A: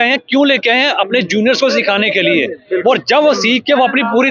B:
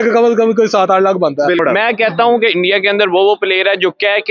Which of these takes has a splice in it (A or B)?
B